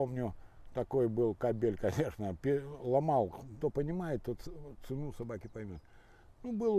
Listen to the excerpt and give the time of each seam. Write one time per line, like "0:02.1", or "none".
0:03.5